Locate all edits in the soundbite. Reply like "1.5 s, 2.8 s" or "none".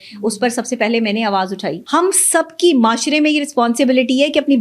1.7 s

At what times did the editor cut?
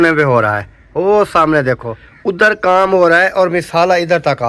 2.6 s

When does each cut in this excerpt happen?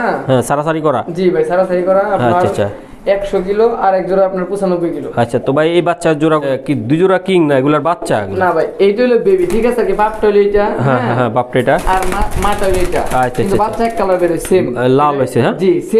6.5 s

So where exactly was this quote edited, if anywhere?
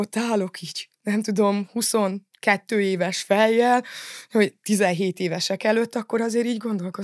none

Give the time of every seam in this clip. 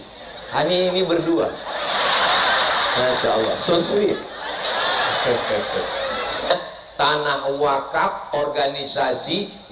6.5 s

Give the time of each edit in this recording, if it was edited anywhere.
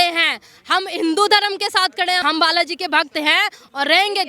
2.2 s

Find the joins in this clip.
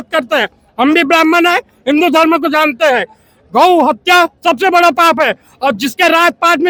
none

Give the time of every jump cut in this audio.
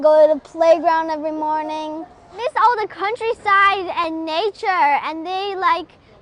2.4 s

